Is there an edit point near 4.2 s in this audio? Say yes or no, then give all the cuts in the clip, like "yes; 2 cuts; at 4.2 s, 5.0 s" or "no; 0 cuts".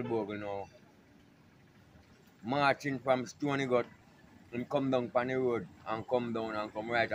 no; 0 cuts